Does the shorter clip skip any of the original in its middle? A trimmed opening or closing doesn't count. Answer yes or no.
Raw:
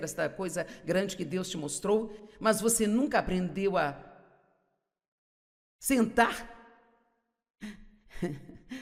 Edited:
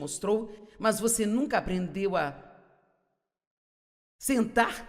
no